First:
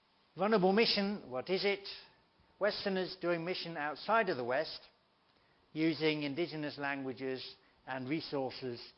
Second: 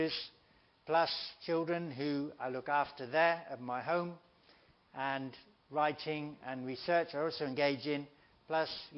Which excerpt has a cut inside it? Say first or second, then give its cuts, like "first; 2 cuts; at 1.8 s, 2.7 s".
first; 1 cut; at 6.2 s